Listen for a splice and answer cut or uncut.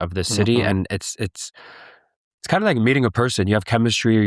uncut